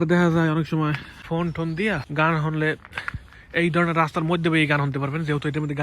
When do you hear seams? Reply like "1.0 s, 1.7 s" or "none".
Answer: 1.1 s, 2.1 s